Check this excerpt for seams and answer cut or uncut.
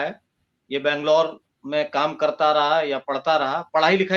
uncut